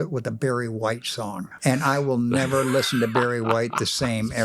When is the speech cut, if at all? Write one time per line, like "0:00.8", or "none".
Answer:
0:01.6